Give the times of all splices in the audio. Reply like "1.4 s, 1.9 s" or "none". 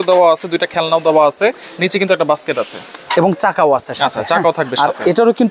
none